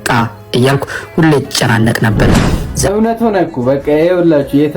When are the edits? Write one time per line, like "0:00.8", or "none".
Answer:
0:02.7